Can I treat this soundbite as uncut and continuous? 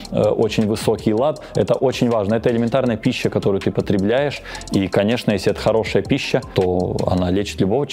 no; 1 cut; at 6.5 s

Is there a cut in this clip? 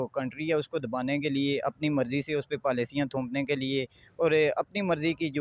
no; 0 cuts

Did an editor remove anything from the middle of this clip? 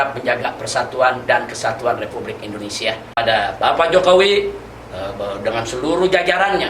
yes; 1 cut; at 3.2 s

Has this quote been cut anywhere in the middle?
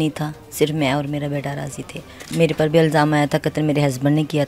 yes; 1 cut; at 2.2 s

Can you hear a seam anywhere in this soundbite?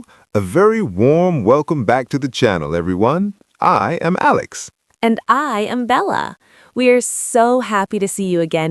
no; 0 cuts

